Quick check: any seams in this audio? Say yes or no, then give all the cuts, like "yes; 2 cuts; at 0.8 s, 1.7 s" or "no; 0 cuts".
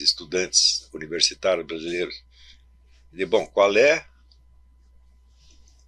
no; 0 cuts